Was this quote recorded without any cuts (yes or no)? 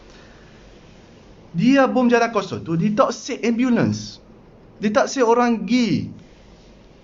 yes